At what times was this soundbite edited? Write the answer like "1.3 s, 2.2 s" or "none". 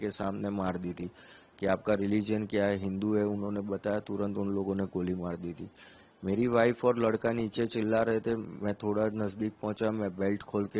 none